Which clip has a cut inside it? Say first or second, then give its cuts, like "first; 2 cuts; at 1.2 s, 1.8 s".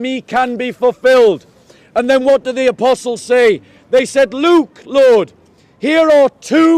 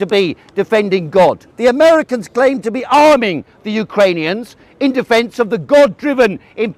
second; 1 cut; at 1.5 s